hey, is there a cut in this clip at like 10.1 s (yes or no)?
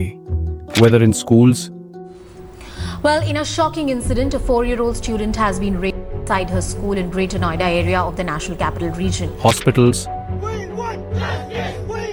no